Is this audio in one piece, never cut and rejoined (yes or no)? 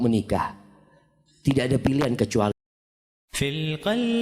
no